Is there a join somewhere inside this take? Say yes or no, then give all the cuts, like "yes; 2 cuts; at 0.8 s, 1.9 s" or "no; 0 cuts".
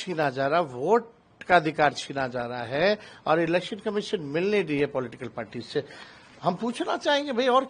no; 0 cuts